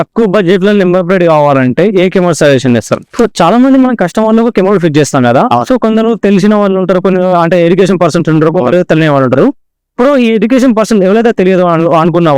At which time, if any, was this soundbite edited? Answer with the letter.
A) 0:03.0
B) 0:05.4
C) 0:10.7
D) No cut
A